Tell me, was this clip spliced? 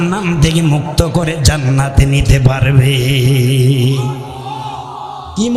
no; 0 cuts

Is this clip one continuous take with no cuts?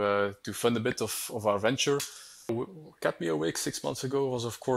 no; 1 cut; at 2.5 s

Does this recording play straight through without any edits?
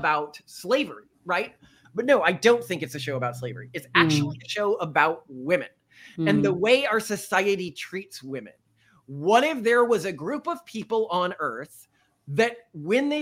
no; 1 cut; at 1.8 s

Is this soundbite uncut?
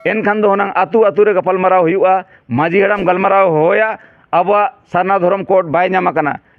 yes; 0 cuts

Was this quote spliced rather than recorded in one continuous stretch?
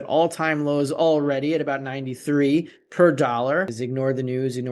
yes; 1 cut; at 3.8 s

